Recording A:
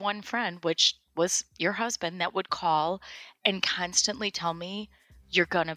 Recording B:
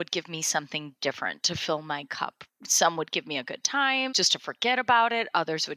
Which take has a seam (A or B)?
B